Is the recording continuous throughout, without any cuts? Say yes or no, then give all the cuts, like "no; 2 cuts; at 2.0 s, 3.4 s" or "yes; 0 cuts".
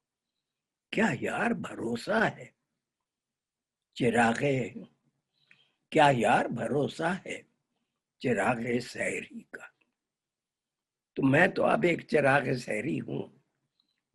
yes; 0 cuts